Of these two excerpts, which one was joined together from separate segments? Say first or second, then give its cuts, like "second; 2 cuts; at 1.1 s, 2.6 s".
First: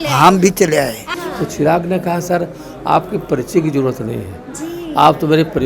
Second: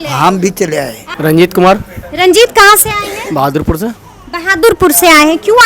first; 1 cut; at 1.0 s